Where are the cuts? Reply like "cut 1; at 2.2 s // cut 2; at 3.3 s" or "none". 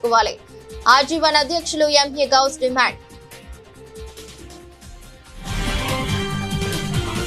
none